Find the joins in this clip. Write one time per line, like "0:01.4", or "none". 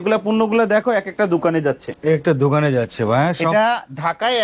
none